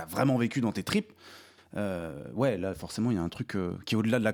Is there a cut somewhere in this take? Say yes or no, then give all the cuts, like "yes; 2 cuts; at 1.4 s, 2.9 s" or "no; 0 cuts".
no; 0 cuts